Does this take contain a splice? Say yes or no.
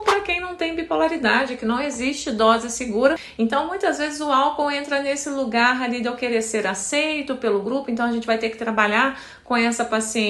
yes